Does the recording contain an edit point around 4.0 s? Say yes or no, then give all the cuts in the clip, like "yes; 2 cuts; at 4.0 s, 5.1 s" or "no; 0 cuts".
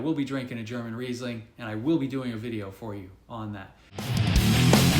yes; 1 cut; at 4.0 s